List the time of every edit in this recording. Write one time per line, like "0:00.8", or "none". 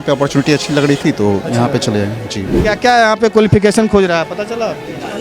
0:02.5

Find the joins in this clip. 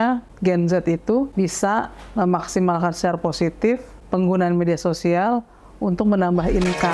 none

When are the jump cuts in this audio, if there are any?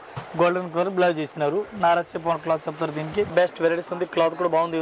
0:03.3

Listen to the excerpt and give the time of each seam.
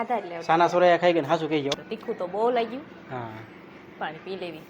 0:01.9

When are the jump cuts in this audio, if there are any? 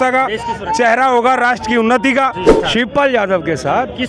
0:02.6

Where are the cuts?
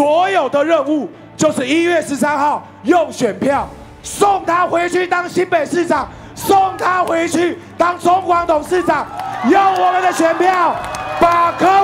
none

